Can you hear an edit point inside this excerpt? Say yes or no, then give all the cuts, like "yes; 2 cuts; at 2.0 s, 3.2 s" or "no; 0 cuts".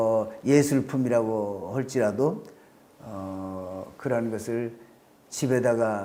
no; 0 cuts